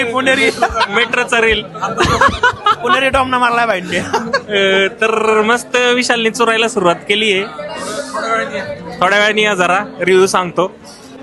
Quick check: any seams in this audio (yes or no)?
no